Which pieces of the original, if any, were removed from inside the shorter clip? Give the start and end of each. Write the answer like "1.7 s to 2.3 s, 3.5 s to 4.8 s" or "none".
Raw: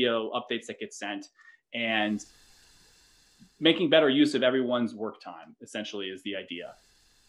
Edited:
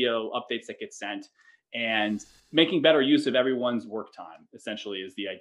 2.4 s to 3.4 s